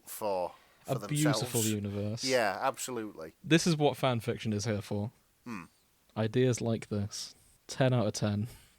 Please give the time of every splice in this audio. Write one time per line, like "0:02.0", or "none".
0:03.4